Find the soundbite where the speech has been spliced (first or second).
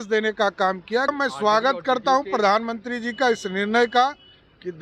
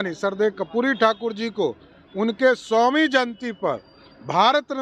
first